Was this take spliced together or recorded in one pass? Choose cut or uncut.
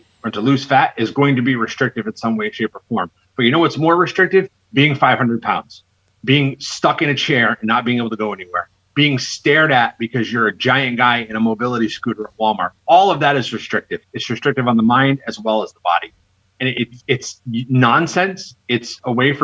uncut